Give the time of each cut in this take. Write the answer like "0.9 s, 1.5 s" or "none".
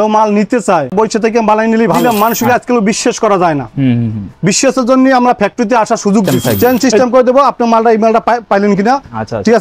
0.9 s, 2.0 s, 6.3 s